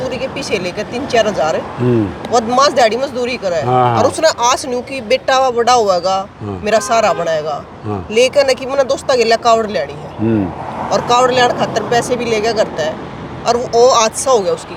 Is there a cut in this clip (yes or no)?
no